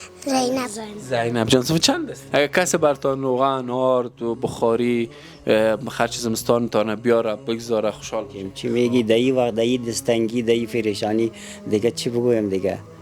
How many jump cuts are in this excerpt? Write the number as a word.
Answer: two